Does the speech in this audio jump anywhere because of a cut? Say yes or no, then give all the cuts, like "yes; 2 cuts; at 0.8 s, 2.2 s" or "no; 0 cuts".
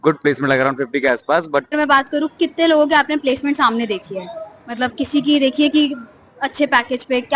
yes; 1 cut; at 1.7 s